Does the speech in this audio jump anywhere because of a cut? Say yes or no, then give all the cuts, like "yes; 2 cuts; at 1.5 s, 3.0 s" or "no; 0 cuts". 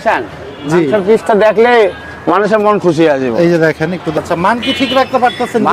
yes; 1 cut; at 4.1 s